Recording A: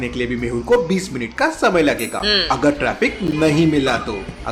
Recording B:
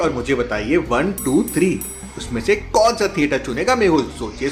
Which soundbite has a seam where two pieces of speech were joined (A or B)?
A